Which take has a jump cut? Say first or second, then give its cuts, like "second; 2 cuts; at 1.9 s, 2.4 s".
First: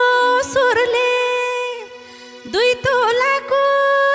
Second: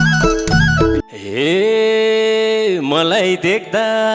second; 1 cut; at 1.0 s